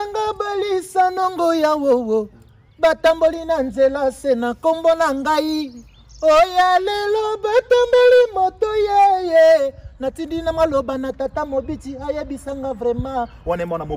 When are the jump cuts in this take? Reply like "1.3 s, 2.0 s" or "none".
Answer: none